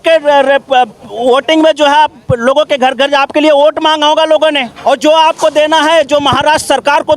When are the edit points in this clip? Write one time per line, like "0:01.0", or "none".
0:04.7